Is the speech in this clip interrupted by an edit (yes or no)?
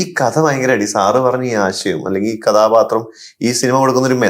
no